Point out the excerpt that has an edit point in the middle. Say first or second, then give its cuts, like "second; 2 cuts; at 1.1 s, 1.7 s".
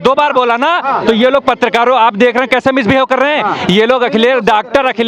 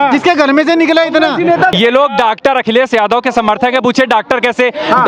second; 1 cut; at 1.7 s